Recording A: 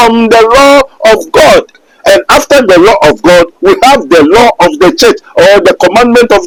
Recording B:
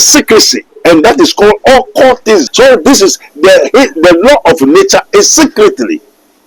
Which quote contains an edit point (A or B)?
B